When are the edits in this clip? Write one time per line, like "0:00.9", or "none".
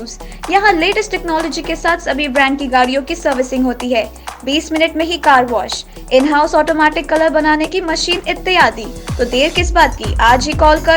none